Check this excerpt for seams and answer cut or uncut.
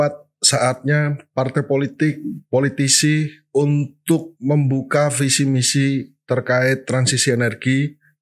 uncut